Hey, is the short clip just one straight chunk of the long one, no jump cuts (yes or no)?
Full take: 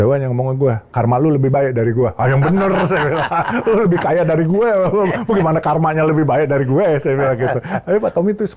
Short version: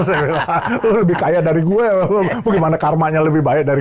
yes